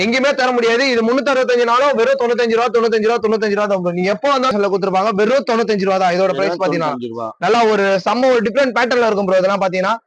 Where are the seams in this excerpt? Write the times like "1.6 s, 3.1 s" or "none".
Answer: 4.5 s